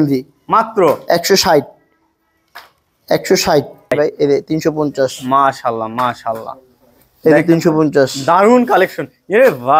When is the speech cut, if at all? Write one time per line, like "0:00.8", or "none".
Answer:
0:03.9